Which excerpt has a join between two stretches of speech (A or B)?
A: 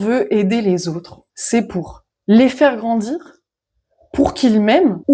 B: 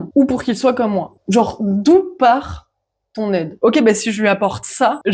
B